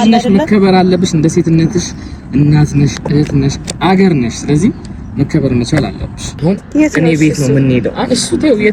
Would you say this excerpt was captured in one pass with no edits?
no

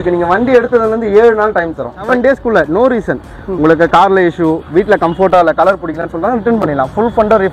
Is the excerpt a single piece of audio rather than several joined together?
no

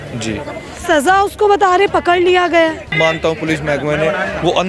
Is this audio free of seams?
no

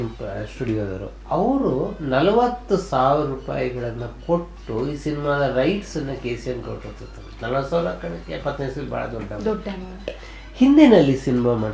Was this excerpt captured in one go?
no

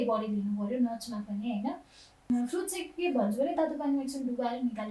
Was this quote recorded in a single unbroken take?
no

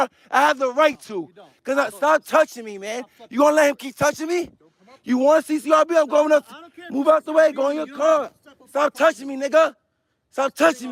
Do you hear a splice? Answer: no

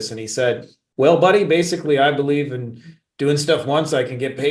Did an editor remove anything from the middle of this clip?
no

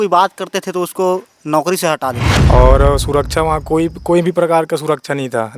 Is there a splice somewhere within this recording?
yes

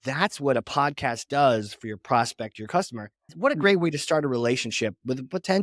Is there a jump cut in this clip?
yes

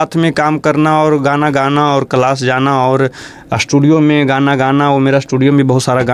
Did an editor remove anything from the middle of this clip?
no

